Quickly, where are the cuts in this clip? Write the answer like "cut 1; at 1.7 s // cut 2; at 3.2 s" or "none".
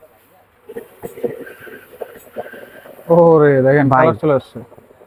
none